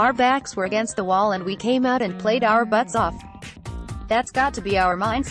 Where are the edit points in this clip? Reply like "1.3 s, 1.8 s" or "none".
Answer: none